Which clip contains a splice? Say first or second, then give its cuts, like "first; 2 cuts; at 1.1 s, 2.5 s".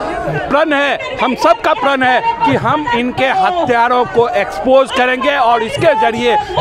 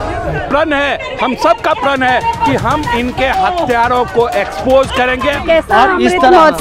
second; 1 cut; at 5.4 s